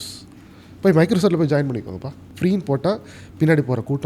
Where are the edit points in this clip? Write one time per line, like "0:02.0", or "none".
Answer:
0:02.2